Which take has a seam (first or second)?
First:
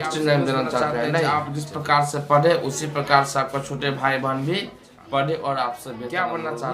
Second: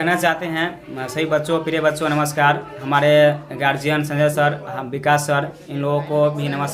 first